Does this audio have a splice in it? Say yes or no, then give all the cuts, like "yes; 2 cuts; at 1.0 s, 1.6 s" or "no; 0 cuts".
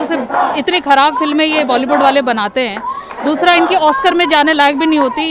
no; 0 cuts